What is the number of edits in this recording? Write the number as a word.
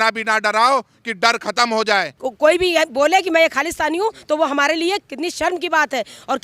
one